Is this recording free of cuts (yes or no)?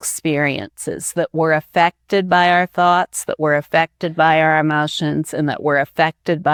yes